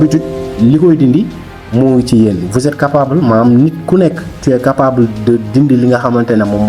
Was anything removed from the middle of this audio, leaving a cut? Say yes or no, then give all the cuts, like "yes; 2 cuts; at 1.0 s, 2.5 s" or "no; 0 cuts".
no; 0 cuts